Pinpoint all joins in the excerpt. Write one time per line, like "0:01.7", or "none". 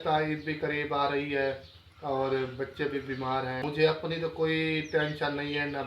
0:03.6